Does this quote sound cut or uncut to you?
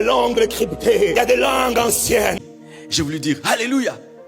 cut